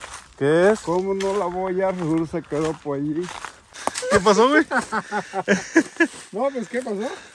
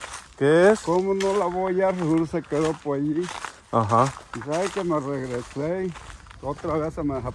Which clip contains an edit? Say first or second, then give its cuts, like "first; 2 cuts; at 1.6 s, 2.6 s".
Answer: first; 1 cut; at 3.7 s